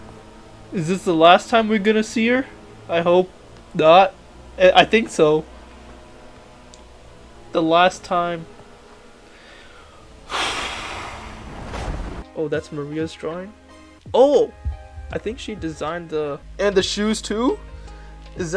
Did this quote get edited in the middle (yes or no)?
yes